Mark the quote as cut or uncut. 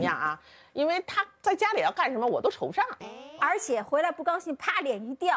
cut